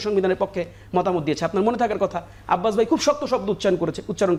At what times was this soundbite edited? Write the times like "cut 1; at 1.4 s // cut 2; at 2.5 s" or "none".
none